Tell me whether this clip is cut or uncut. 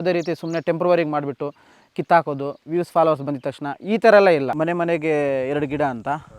cut